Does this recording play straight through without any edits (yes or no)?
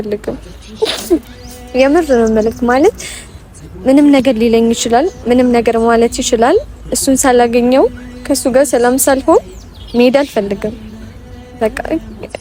yes